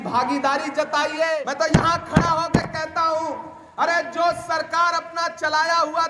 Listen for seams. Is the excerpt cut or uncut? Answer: cut